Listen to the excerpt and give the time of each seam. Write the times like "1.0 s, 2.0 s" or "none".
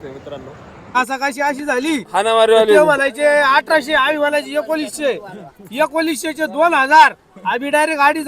1.0 s